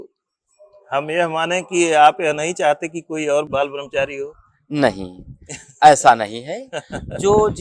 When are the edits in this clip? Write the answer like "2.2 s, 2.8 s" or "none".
3.5 s

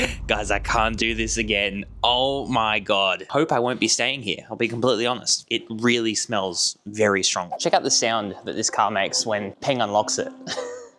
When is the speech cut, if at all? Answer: 3.2 s, 7.5 s

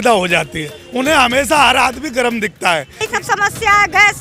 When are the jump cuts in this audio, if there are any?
3.1 s

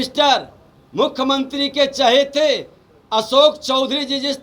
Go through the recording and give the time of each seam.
none

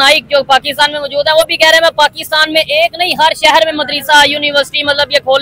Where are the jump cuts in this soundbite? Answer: none

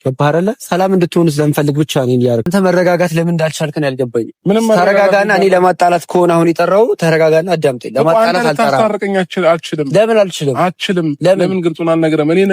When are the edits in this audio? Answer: 2.5 s

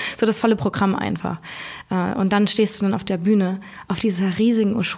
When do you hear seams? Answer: none

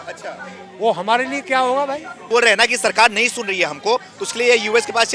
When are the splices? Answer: 2.1 s

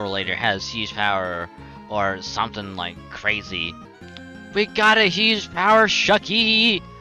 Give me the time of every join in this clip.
3.9 s

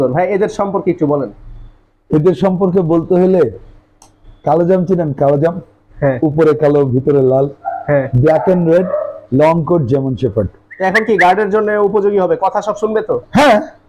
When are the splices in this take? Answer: 10.6 s

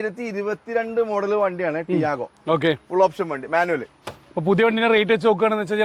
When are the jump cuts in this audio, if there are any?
none

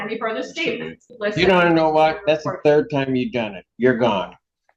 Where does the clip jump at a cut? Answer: 1.0 s

